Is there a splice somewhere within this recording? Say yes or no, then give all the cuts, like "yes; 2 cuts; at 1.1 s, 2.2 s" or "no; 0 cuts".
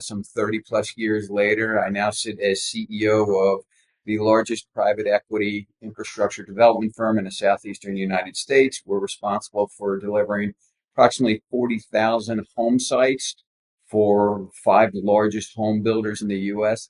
no; 0 cuts